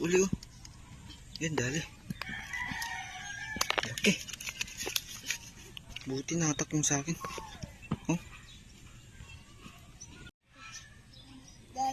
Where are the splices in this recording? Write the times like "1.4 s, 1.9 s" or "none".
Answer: 10.3 s